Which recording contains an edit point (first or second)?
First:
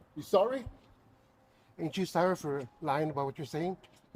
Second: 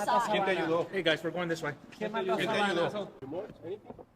second